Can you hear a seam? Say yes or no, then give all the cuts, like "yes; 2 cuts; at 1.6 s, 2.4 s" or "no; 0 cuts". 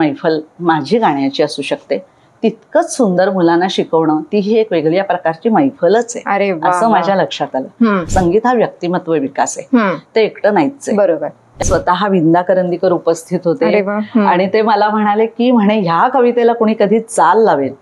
yes; 2 cuts; at 8.0 s, 11.6 s